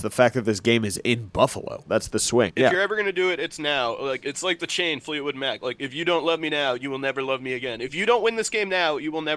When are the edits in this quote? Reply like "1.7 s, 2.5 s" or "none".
2.2 s, 4.2 s